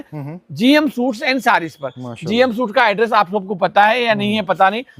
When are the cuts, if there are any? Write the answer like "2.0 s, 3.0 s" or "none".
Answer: none